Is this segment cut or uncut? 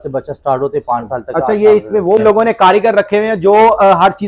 cut